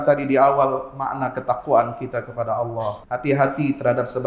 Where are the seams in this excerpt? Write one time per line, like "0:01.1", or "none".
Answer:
0:03.0